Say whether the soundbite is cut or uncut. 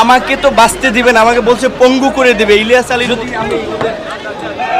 cut